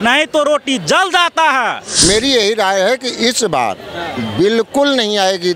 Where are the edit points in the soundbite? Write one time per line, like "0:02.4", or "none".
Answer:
0:01.8